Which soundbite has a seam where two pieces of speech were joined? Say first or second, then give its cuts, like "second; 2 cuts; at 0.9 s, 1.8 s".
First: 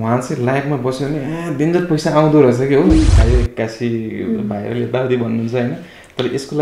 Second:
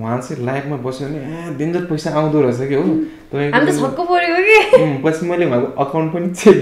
first; 1 cut; at 3.2 s